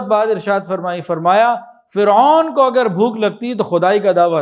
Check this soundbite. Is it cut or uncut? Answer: uncut